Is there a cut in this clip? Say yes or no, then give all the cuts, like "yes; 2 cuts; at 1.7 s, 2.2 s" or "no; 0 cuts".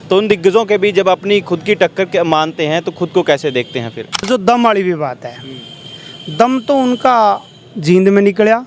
yes; 1 cut; at 4.2 s